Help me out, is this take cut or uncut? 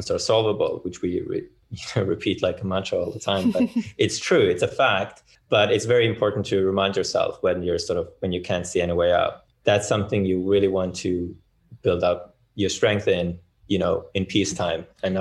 cut